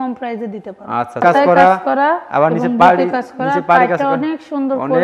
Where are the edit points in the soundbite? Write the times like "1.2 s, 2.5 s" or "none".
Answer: 1.2 s